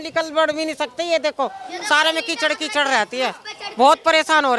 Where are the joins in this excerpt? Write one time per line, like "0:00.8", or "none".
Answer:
none